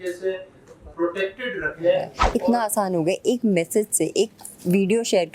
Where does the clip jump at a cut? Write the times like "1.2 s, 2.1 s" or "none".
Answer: 2.2 s